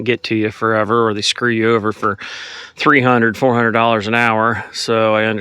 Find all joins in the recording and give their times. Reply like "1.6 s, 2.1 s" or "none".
none